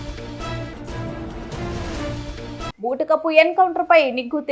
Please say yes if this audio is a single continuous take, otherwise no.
no